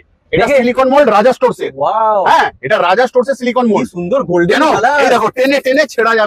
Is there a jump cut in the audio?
no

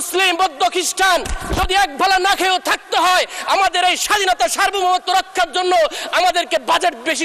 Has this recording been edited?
no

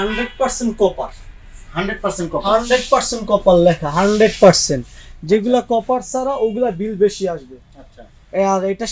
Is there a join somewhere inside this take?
no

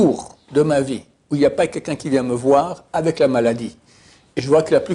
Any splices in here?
no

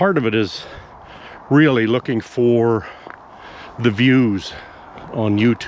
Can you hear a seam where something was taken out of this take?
no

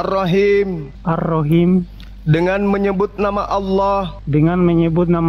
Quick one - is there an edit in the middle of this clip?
no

